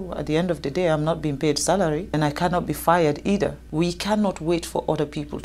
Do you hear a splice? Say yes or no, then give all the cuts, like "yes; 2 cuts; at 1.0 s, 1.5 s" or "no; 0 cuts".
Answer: yes; 2 cuts; at 2.2 s, 3.6 s